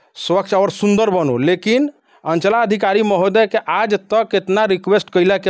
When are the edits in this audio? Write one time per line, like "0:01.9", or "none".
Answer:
none